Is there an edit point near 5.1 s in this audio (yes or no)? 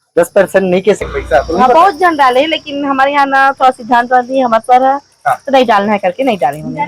no